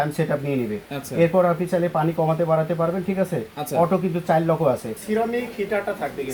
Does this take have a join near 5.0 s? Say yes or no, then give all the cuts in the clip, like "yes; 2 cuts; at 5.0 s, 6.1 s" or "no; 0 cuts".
yes; 1 cut; at 5.0 s